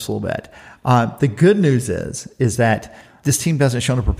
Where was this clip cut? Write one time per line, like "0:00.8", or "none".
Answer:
0:03.0